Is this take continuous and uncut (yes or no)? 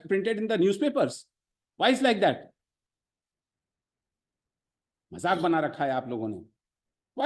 yes